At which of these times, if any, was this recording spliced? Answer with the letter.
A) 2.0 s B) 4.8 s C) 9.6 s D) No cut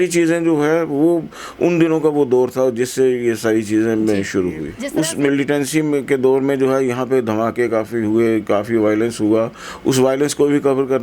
B